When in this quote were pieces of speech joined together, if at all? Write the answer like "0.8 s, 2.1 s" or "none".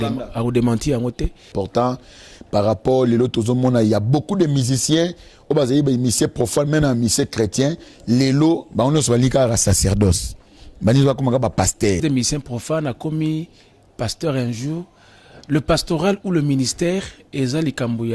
1.5 s, 12.0 s